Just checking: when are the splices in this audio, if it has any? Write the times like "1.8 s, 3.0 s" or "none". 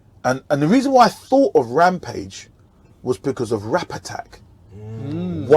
none